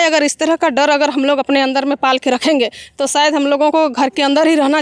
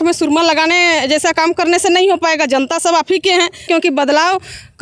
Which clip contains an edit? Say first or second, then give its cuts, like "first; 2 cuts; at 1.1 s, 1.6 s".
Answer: second; 1 cut; at 3.6 s